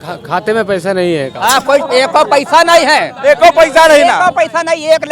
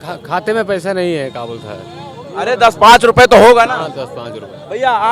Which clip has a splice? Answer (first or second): first